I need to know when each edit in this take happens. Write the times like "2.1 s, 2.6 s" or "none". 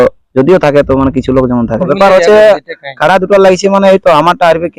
1.9 s